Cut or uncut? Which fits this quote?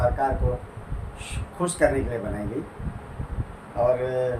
uncut